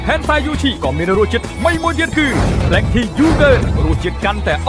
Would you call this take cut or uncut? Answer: uncut